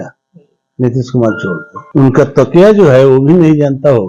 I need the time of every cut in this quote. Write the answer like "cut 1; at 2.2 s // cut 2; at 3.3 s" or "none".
cut 1; at 1.7 s